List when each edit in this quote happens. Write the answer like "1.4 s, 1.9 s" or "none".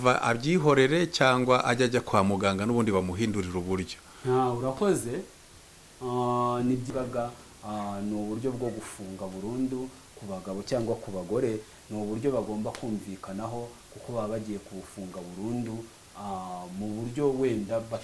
6.8 s